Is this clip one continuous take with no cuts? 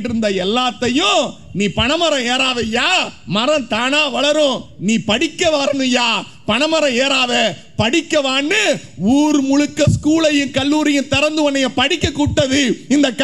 yes; 0 cuts

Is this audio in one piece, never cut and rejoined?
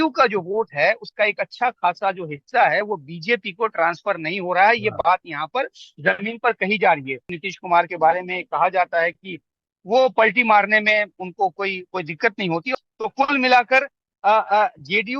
no; 2 cuts; at 7.4 s, 12.7 s

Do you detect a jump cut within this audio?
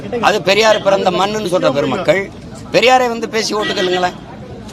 no; 0 cuts

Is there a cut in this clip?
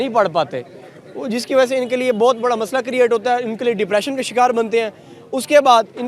no; 0 cuts

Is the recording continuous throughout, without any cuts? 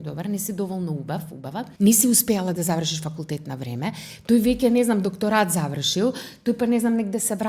no; 1 cut; at 1.7 s

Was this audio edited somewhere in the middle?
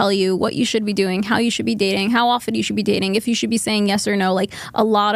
no; 0 cuts

